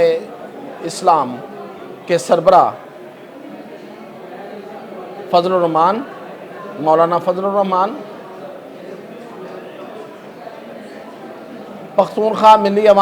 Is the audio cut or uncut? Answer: uncut